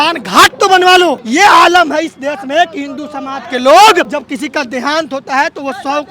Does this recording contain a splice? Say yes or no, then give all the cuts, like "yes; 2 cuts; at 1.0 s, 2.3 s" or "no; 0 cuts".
yes; 2 cuts; at 1.2 s, 4.1 s